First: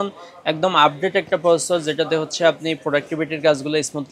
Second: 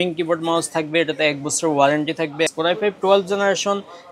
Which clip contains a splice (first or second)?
second